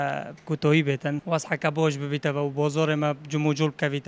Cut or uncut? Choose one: cut